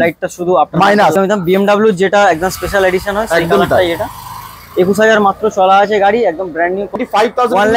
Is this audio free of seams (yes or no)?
no